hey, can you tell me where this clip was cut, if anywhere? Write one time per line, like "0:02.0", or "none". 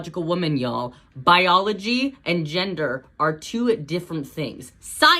0:01.0